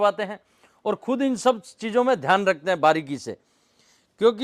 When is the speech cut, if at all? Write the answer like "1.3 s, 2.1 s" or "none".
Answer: none